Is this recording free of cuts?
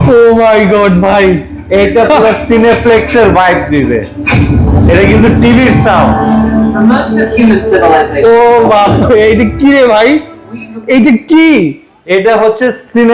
yes; 0 cuts

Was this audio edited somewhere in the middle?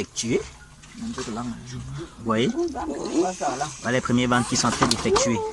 no; 0 cuts

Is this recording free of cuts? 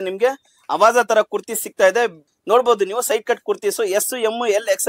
no; 1 cut; at 2.3 s

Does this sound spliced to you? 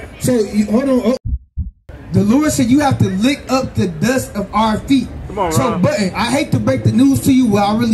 yes; 1 cut; at 1.4 s

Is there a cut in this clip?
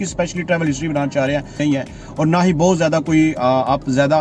yes; 1 cut; at 1.6 s

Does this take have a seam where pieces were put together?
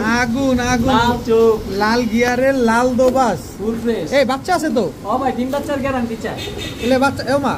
no; 0 cuts

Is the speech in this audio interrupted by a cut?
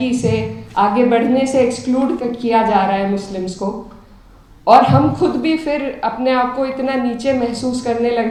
no; 0 cuts

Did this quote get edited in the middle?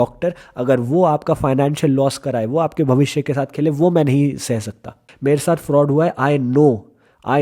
yes; 1 cut; at 5.0 s

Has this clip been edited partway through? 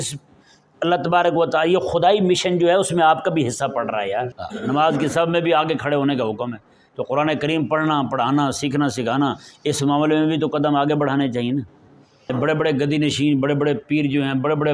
yes; 2 cuts; at 4.4 s, 12.3 s

